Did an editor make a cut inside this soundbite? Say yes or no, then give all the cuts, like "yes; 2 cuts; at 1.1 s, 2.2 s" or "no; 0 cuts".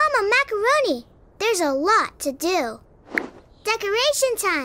yes; 1 cut; at 2.9 s